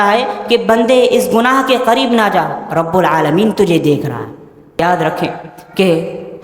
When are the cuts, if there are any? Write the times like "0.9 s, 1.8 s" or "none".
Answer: 4.8 s